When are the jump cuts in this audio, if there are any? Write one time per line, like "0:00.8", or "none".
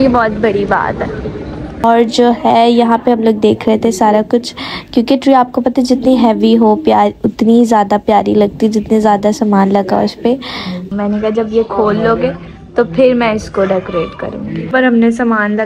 0:01.8
0:10.9
0:14.7

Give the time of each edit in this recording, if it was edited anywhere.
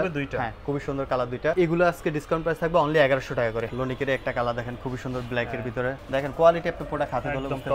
0:01.5
0:03.7
0:06.0

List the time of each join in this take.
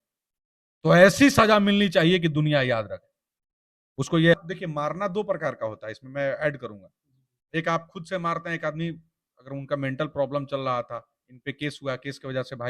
0:04.3

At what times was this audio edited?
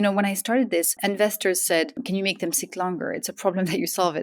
0:01.0
0:02.0

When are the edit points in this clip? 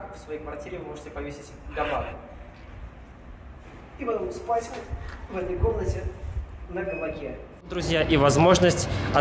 0:07.9

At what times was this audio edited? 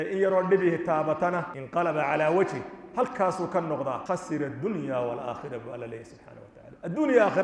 0:01.6
0:04.0

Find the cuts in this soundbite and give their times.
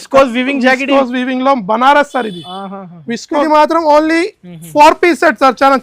0:03.4

